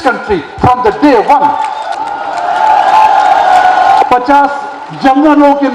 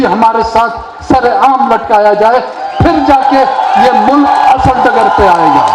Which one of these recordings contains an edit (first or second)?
first